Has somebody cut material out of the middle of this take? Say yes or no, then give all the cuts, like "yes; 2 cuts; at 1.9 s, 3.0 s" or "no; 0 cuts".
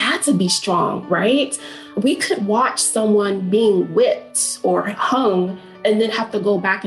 yes; 1 cut; at 1.9 s